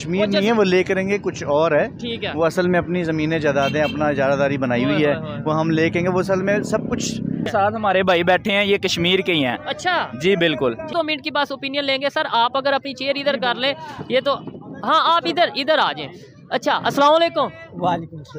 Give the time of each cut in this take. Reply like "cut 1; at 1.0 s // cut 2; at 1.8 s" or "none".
cut 1; at 7.5 s // cut 2; at 10.9 s